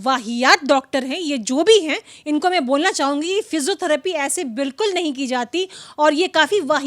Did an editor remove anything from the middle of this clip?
no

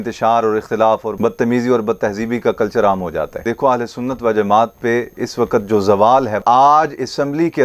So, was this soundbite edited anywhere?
yes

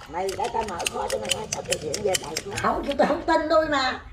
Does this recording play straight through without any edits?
no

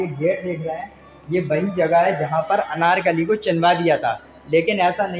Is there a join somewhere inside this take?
no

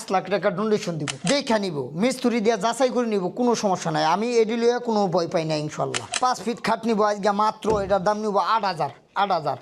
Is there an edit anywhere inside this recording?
yes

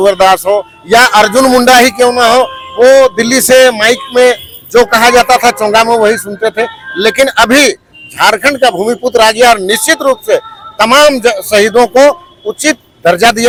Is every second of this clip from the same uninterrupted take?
yes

